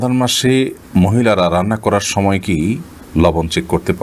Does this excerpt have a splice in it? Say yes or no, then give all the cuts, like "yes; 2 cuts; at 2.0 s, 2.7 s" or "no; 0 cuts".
no; 0 cuts